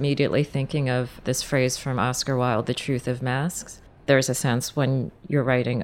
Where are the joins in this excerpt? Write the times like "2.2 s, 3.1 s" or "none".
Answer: 3.9 s